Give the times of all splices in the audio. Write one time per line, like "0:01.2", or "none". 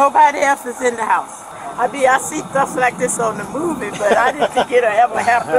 0:01.5